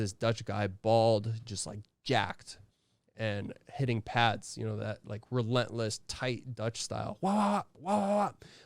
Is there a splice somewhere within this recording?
no; 0 cuts

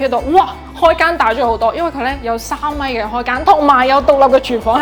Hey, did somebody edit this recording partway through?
no; 0 cuts

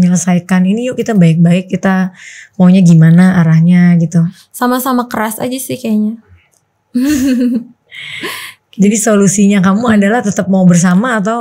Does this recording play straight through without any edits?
yes; 0 cuts

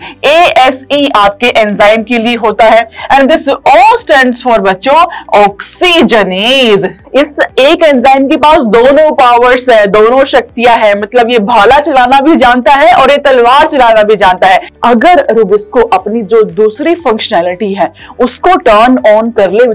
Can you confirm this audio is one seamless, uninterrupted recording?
no; 2 cuts; at 7.0 s, 14.7 s

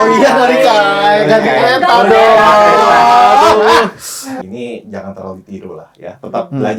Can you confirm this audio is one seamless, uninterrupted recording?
no; 1 cut; at 4.3 s

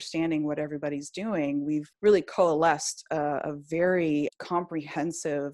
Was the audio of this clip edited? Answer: yes; 2 cuts; at 1.9 s, 4.3 s

